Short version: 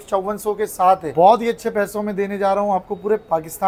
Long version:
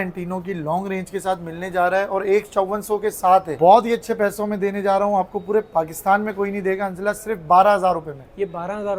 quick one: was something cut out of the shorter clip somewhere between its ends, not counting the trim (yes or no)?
no